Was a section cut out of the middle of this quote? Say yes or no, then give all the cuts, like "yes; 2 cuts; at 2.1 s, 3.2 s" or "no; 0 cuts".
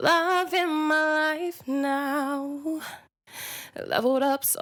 no; 0 cuts